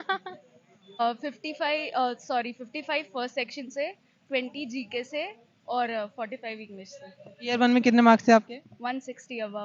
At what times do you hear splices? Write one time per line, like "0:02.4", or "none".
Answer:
0:01.0